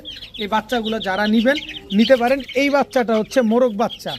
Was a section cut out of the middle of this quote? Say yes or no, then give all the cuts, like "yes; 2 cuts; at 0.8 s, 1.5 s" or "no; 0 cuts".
no; 0 cuts